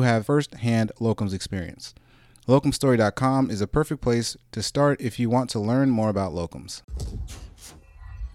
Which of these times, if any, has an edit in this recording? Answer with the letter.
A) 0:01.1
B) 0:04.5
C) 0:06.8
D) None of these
C